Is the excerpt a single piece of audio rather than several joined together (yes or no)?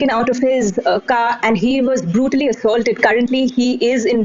yes